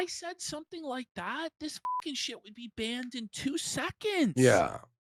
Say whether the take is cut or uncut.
uncut